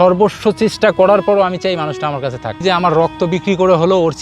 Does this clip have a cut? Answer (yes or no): yes